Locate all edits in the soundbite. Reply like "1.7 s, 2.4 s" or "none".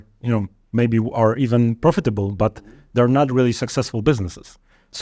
none